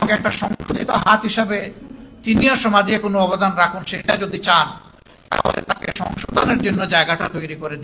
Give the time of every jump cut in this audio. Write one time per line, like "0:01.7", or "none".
none